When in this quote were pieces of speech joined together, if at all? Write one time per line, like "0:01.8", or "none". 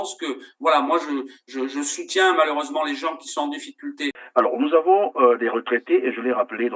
0:04.2